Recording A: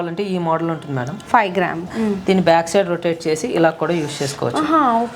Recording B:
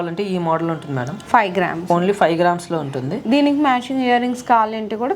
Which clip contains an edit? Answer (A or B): A